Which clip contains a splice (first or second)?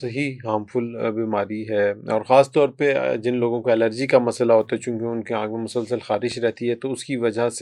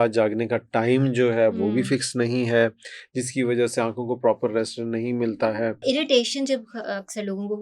second